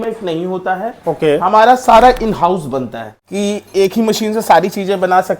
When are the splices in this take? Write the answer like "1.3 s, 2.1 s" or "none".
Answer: 3.2 s